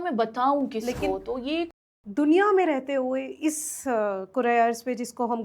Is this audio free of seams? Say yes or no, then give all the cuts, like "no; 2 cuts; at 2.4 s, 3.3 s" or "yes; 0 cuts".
no; 1 cut; at 1.7 s